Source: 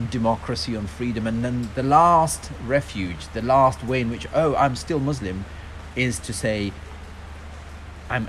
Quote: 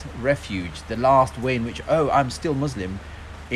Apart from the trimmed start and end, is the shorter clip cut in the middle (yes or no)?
no